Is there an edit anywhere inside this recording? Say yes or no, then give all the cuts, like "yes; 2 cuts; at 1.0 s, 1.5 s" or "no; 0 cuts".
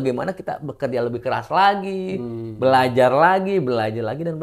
no; 0 cuts